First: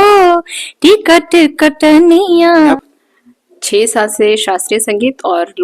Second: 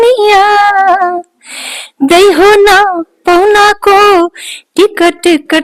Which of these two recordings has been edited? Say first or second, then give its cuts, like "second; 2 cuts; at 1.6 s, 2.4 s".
first; 1 cut; at 2.8 s